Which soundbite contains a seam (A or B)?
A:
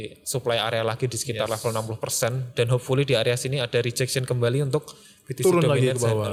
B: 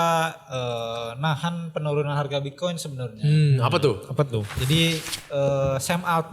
B